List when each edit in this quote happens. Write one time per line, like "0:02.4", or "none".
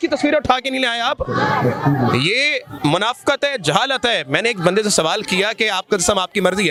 none